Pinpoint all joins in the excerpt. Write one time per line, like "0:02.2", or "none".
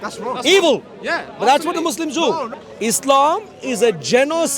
0:02.5